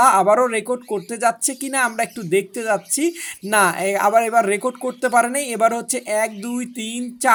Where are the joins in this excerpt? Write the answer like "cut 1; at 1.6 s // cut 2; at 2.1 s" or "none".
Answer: none